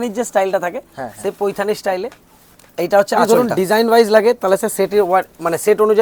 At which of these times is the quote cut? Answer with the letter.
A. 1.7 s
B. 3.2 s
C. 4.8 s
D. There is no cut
B